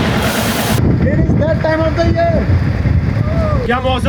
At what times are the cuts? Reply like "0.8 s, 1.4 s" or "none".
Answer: none